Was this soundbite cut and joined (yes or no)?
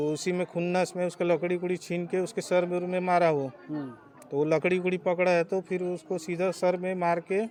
no